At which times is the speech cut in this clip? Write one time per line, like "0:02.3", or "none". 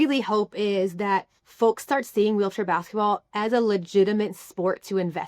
0:01.4